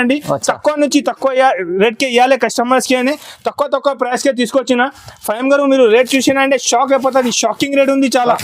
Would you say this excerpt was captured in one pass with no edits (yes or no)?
yes